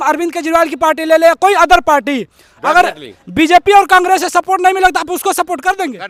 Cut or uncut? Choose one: uncut